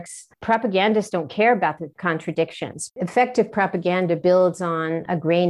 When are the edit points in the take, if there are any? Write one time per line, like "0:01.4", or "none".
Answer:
0:02.8